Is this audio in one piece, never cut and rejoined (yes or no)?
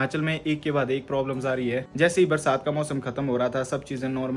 no